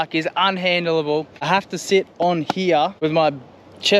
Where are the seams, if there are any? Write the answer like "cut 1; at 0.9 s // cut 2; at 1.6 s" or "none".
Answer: cut 1; at 1.3 s // cut 2; at 2.9 s